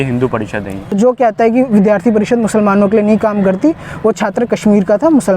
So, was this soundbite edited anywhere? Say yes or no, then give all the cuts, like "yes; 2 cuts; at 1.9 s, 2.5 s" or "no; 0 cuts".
yes; 1 cut; at 0.9 s